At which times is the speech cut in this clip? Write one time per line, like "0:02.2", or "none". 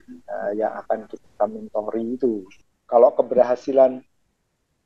0:02.6